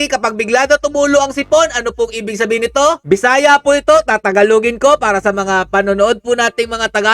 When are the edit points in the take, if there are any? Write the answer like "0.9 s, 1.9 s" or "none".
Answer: none

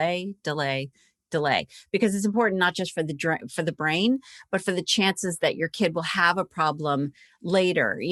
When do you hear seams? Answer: none

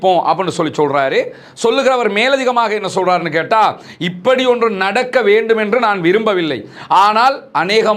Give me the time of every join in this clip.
none

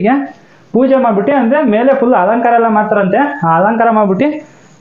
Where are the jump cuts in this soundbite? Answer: none

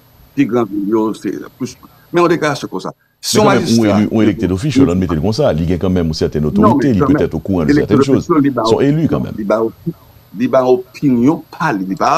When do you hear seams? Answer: none

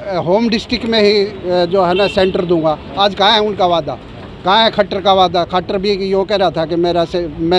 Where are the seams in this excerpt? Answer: none

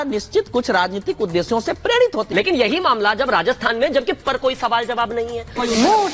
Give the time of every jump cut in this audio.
none

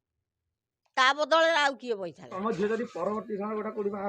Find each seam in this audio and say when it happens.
2.3 s

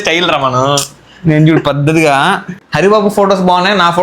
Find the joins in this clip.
2.6 s

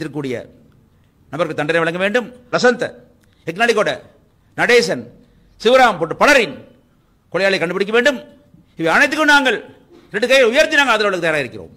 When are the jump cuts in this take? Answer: 2.4 s

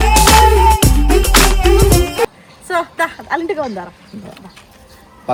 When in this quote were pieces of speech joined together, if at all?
none

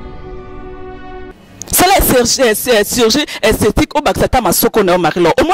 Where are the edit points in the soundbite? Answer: 1.2 s

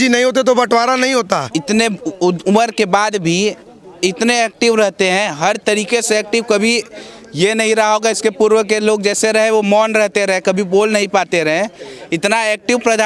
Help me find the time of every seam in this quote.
1.5 s

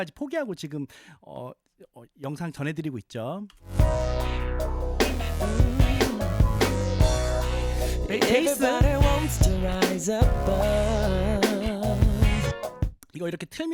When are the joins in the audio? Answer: none

